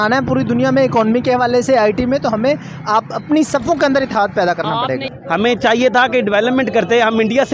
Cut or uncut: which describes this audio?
cut